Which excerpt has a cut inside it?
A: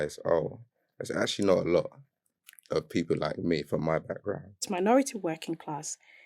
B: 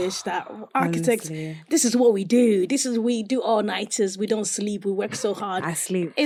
A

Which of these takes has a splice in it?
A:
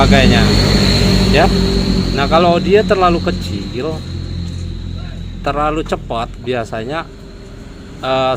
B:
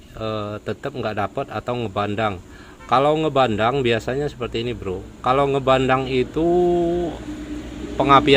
A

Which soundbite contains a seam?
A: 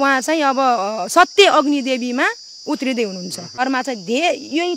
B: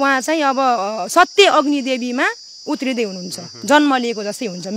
A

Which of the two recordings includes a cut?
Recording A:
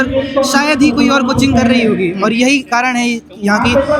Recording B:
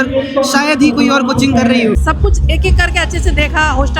B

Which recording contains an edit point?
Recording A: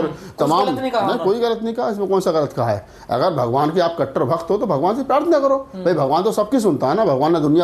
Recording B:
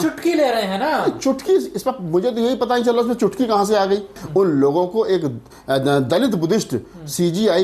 B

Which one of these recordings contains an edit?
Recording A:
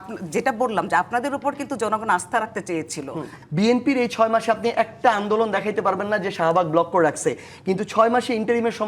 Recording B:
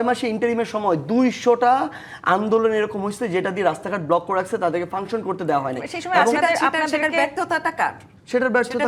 A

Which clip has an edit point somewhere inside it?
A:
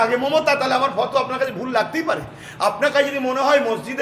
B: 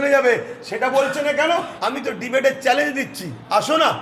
B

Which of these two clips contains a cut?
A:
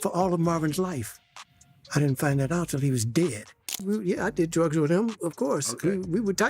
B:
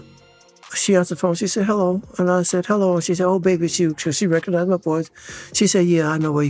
A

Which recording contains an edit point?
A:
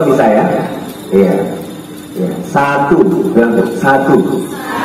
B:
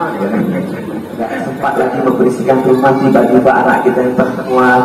B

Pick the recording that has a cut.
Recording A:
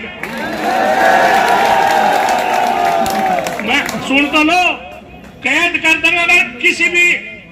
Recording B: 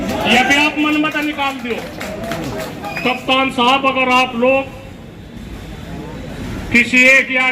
B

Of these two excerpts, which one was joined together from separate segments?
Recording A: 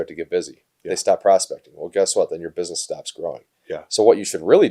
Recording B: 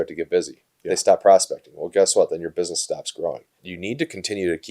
B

